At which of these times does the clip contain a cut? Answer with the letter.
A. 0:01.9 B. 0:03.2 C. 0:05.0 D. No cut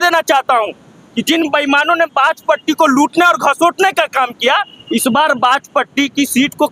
D